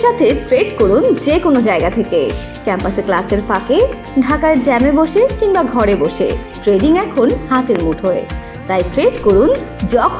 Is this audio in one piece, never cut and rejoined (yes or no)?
yes